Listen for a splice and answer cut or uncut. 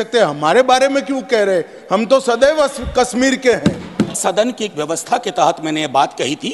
cut